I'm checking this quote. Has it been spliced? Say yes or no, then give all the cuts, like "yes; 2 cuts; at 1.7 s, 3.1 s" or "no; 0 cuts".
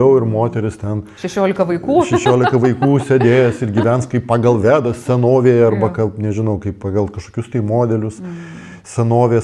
no; 0 cuts